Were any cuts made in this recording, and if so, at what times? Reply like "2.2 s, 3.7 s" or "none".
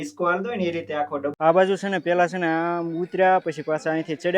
1.3 s